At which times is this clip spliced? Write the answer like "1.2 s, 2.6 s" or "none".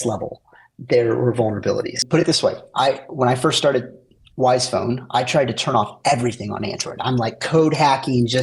2.0 s